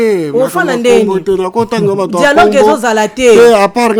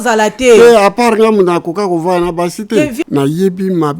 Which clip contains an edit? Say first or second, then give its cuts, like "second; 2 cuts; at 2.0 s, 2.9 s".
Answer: second; 1 cut; at 3.0 s